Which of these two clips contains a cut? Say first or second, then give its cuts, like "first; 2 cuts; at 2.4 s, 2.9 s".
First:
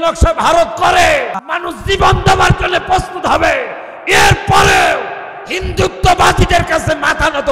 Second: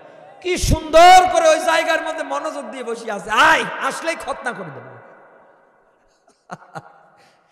first; 1 cut; at 1.5 s